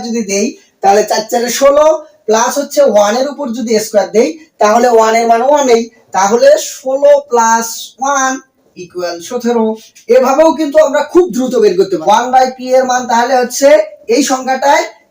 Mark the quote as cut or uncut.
cut